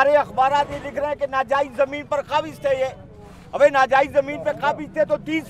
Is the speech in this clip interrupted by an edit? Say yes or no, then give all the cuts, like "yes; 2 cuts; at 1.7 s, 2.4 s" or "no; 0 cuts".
no; 0 cuts